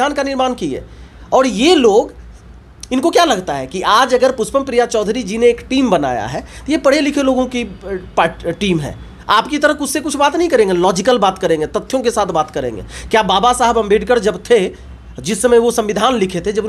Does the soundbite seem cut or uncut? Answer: uncut